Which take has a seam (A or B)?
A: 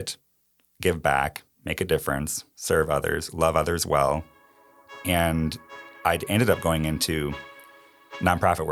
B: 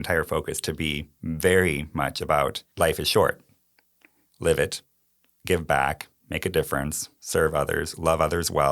B